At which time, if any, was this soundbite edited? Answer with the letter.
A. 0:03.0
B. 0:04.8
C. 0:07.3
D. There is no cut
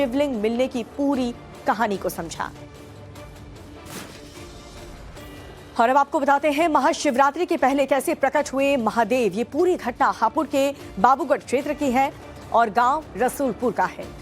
C